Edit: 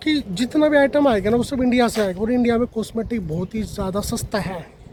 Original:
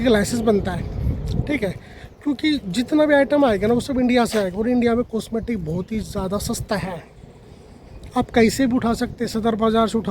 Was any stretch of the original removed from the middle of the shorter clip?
no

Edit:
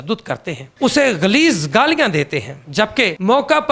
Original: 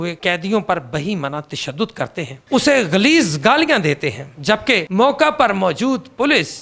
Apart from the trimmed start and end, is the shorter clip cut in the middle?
no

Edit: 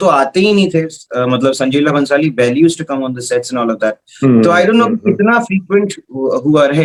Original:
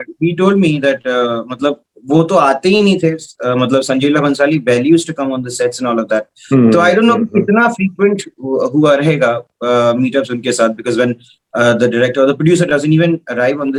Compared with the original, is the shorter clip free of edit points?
yes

